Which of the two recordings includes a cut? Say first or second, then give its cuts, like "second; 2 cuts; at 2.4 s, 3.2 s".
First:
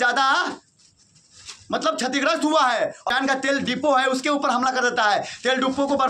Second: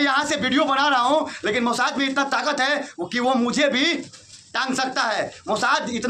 first; 1 cut; at 3.1 s